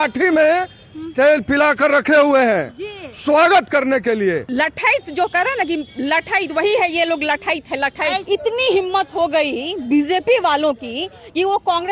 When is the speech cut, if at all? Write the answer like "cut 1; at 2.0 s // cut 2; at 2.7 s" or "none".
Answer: cut 1; at 4.5 s // cut 2; at 8.2 s

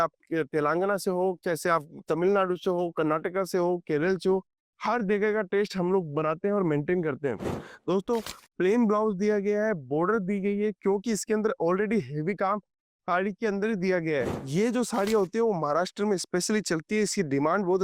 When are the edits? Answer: cut 1; at 14.4 s

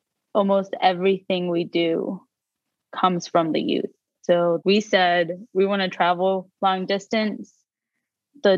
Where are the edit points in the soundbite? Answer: cut 1; at 6.5 s

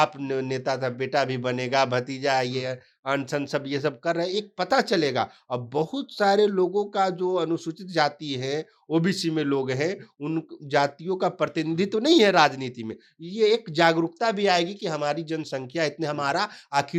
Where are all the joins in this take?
none

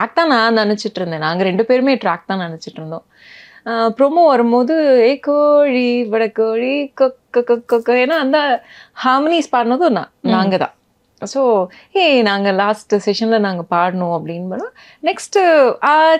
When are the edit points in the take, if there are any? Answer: none

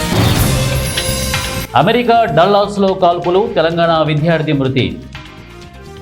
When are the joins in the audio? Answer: cut 1; at 0.9 s // cut 2; at 1.7 s // cut 3; at 5.1 s

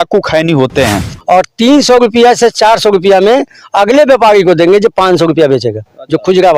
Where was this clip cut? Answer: cut 1; at 1.1 s

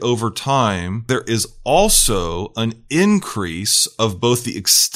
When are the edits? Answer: cut 1; at 1.1 s

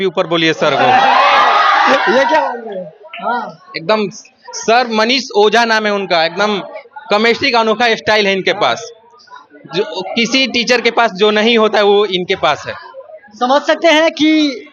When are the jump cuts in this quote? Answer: none

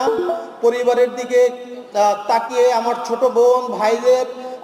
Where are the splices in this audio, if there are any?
none

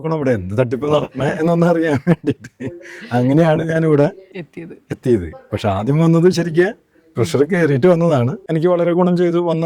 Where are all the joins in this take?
none

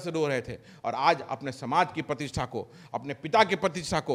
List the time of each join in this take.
none

